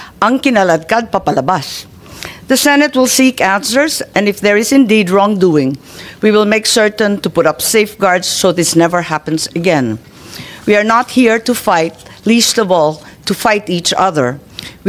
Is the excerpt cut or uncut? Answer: uncut